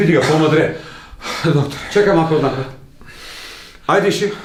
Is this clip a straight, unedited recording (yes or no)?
yes